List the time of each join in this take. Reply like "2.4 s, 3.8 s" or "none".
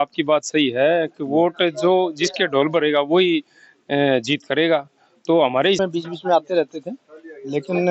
5.8 s

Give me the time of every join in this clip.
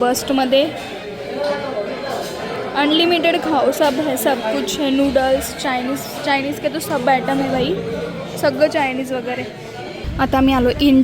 10.0 s

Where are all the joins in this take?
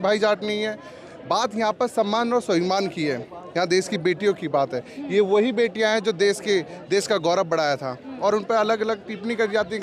8.1 s

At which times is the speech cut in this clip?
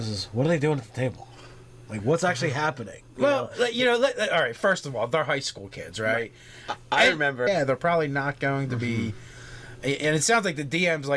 none

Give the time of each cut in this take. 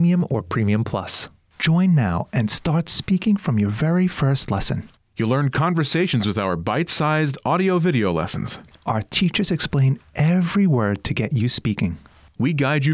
1.2 s

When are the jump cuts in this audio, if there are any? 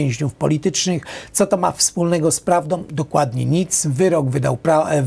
none

